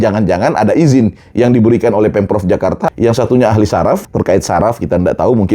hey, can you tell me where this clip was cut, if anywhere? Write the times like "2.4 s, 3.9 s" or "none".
2.8 s, 4.0 s